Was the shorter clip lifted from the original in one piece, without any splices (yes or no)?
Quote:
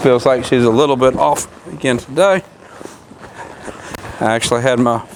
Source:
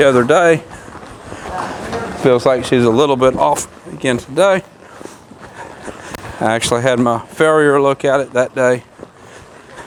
yes